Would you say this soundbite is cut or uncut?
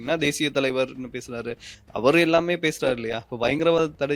uncut